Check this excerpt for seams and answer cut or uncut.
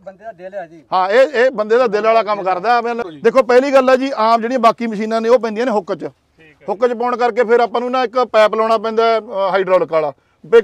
cut